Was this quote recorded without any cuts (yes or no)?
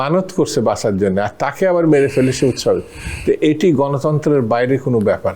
yes